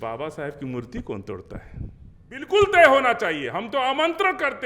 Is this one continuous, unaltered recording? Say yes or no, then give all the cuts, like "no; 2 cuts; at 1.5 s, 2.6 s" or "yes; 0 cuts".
no; 1 cut; at 2.5 s